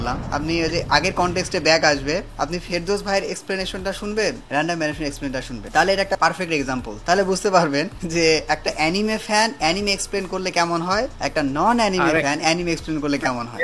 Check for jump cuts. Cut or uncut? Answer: uncut